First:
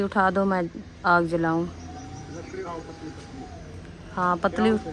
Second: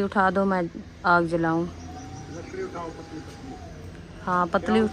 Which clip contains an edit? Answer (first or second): first